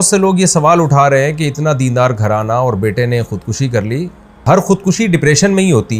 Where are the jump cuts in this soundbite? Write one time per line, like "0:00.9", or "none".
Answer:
0:04.4